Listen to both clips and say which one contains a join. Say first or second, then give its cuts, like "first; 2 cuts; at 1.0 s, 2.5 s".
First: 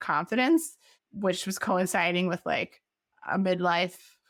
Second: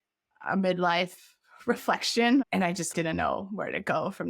second; 1 cut; at 2.4 s